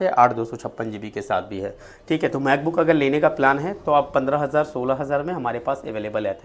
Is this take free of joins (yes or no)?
yes